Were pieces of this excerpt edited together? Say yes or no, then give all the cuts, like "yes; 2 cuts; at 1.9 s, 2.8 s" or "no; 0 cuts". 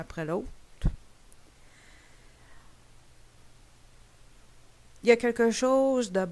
no; 0 cuts